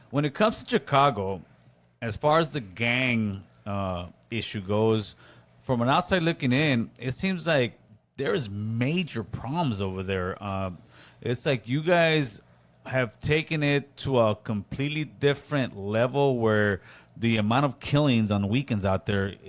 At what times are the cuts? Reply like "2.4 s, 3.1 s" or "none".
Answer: none

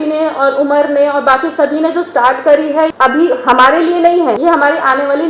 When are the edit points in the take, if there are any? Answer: 2.9 s, 4.4 s

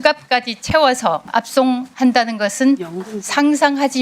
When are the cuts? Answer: 1.2 s

